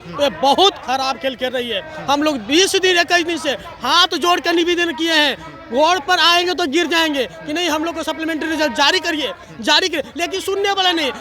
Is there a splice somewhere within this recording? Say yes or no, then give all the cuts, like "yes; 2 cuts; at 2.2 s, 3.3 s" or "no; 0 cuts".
no; 0 cuts